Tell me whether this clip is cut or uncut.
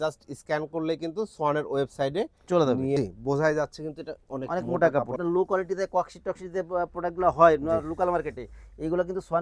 cut